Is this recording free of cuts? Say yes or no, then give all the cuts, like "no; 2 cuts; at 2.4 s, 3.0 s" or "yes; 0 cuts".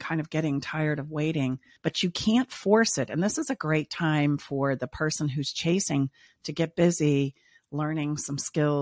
no; 1 cut; at 1.7 s